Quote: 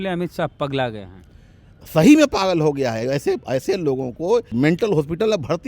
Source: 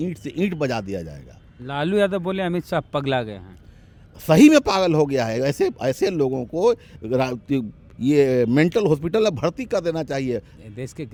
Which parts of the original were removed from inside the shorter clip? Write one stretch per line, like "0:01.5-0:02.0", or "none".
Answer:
0:06.9-0:08.5